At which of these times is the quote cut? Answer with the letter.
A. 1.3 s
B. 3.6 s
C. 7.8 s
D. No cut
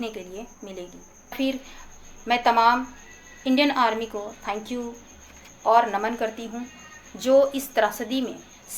A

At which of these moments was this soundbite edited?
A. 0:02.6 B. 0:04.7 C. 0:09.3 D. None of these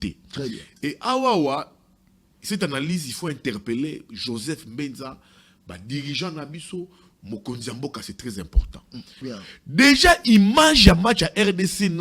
C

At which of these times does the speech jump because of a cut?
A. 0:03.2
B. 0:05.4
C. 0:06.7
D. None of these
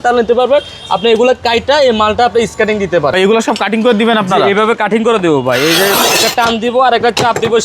A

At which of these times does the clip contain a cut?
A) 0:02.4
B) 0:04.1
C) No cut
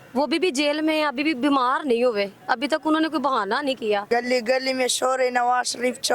B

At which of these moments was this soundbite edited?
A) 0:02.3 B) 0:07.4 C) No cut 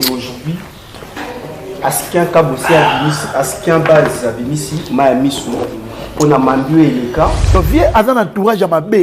B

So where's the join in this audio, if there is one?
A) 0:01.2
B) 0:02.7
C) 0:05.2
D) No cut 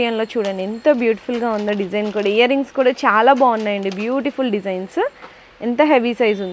D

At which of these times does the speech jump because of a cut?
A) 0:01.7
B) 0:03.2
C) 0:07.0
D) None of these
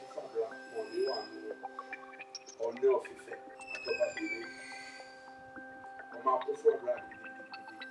C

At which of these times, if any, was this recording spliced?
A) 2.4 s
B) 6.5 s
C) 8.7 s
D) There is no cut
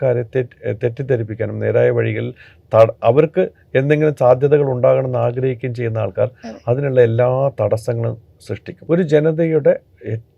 C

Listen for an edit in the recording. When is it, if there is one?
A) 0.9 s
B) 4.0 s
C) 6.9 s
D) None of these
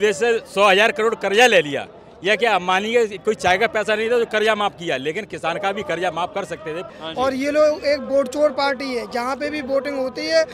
C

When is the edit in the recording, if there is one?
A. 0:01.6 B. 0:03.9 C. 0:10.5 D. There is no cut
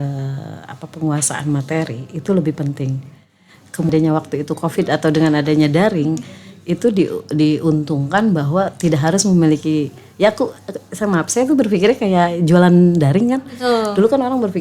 B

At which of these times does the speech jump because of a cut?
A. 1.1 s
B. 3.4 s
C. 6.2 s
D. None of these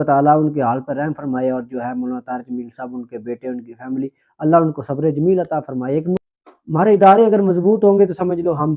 C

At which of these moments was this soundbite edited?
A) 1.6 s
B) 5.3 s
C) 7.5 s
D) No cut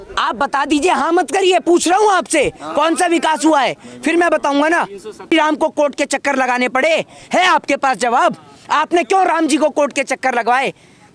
B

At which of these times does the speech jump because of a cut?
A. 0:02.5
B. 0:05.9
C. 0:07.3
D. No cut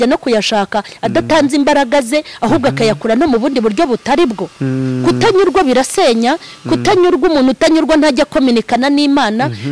D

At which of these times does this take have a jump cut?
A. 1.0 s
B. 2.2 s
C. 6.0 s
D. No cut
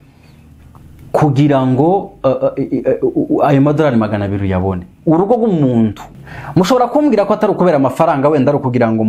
C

